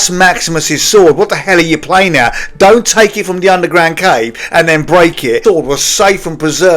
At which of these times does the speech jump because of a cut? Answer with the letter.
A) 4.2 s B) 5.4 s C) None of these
B